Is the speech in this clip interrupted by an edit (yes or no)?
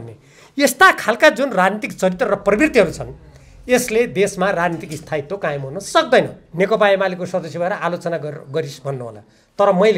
yes